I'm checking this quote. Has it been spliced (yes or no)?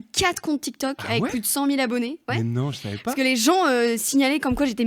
no